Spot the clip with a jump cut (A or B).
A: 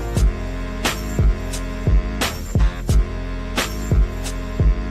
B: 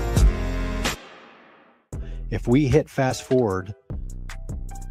A